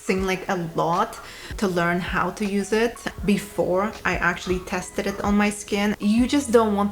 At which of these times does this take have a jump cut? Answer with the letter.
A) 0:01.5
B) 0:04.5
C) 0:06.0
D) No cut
C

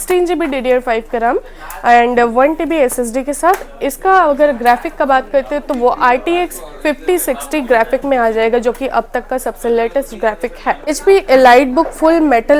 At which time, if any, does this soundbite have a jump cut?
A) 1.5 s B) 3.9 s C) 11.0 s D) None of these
C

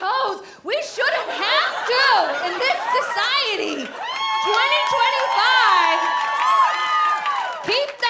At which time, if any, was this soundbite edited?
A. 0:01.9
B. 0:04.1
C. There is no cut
C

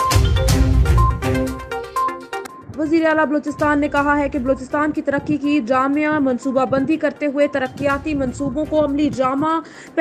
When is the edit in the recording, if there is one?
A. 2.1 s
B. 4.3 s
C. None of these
A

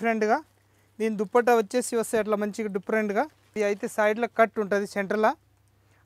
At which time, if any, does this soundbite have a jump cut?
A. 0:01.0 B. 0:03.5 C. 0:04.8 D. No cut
B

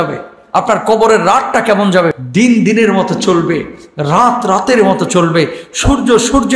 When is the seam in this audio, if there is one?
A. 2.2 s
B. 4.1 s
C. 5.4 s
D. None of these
A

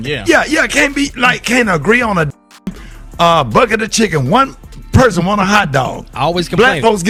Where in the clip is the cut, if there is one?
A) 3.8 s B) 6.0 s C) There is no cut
C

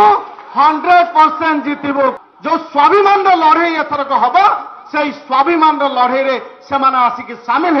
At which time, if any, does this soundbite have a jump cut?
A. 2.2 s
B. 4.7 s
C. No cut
A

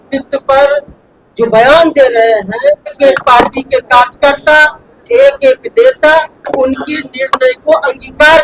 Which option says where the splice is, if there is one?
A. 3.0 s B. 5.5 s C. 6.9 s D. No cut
A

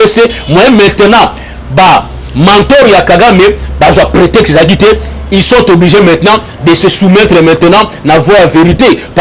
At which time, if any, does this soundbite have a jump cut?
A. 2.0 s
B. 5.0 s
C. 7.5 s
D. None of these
D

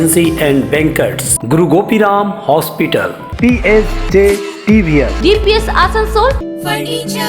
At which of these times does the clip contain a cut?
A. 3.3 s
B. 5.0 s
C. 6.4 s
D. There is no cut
C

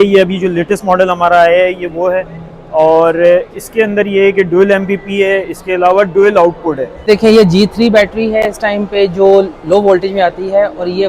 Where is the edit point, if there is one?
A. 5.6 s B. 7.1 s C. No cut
B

